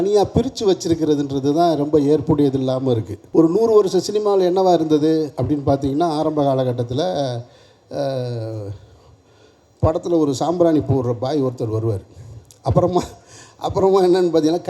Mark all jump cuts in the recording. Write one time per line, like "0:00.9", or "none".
0:03.2